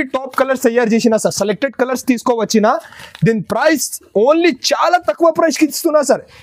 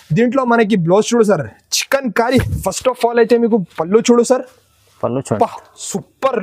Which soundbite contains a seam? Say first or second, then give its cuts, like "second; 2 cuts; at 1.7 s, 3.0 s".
second; 1 cut; at 2.5 s